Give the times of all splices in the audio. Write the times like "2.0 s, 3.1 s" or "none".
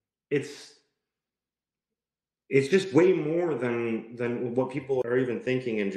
5.0 s